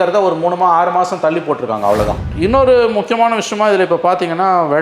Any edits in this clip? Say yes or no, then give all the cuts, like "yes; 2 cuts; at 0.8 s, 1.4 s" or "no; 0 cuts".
yes; 1 cut; at 2.2 s